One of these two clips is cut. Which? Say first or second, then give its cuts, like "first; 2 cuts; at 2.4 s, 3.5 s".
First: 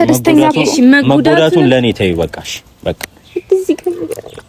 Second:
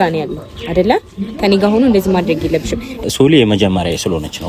second; 1 cut; at 3.0 s